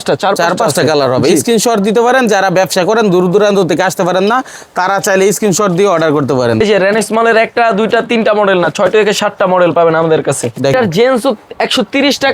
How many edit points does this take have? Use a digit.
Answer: 2